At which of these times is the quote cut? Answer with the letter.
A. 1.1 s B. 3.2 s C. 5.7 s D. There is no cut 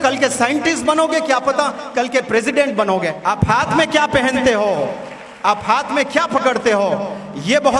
B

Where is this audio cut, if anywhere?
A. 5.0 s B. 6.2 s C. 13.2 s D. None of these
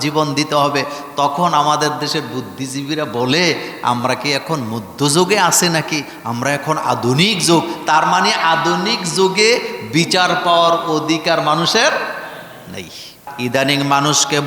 C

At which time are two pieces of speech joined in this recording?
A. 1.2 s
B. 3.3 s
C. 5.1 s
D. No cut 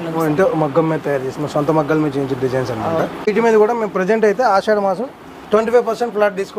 B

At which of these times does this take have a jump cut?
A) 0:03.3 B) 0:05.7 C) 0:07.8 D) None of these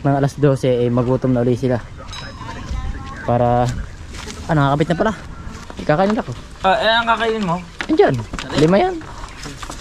B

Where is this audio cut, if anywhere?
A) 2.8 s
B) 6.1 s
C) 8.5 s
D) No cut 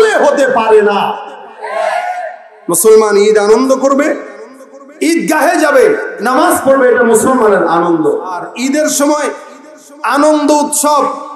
C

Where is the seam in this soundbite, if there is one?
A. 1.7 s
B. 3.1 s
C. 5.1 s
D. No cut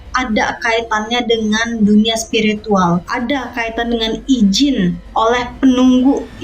B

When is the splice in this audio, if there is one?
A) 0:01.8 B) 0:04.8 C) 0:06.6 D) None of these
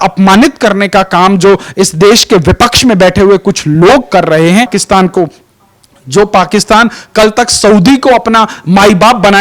B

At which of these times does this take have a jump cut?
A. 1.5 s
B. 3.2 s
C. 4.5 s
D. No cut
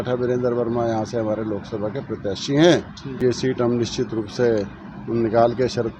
B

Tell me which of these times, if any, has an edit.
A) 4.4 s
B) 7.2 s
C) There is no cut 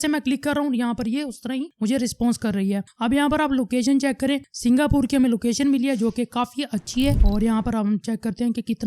B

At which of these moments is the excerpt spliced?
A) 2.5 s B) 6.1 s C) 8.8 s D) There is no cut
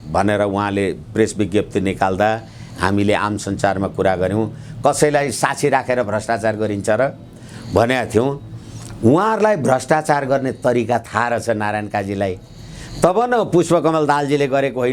D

